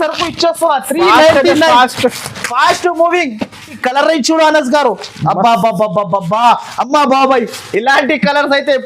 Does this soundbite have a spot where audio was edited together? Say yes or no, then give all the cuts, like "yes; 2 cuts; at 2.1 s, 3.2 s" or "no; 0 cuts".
yes; 1 cut; at 3.8 s